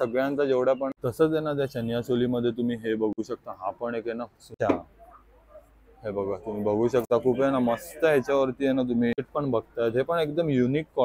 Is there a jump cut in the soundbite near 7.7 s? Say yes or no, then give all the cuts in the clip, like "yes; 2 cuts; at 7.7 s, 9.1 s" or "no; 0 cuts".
no; 3 cuts; at 1.0 s, 4.6 s, 9.3 s